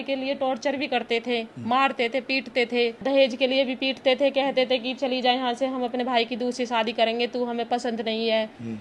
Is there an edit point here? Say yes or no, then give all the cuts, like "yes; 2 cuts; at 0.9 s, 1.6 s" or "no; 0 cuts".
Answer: yes; 1 cut; at 3.0 s